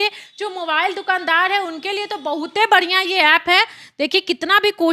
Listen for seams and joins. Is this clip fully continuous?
yes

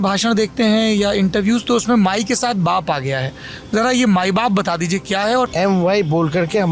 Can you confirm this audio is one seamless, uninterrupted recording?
no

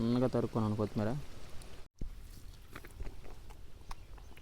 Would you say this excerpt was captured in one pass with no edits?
no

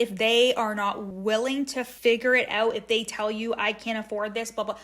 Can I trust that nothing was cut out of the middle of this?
no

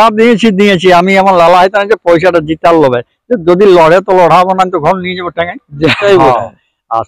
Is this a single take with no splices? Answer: no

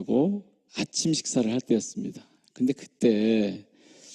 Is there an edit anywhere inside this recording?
yes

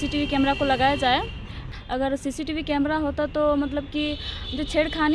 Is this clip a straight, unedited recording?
no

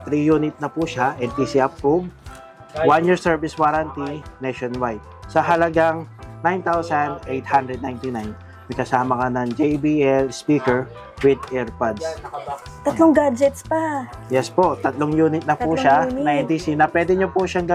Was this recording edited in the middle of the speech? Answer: no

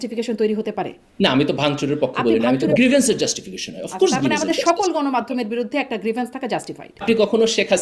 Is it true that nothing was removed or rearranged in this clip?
no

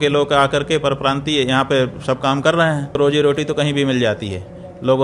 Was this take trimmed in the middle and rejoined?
yes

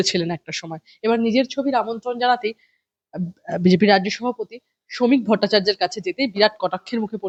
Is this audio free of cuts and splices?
yes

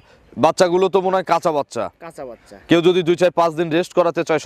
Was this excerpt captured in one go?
yes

